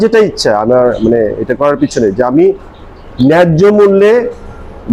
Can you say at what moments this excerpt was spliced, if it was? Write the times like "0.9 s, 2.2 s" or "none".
none